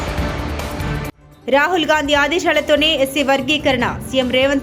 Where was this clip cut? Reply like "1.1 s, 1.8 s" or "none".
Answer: 1.2 s